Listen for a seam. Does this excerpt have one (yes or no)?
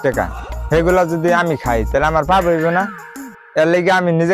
no